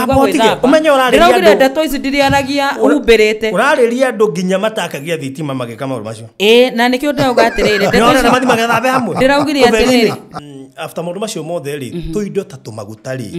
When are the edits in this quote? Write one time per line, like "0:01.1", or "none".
0:10.3